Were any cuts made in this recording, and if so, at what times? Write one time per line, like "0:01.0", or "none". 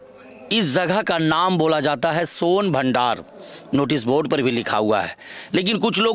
none